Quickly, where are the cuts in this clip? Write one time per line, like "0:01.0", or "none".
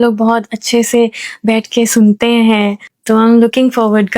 0:02.9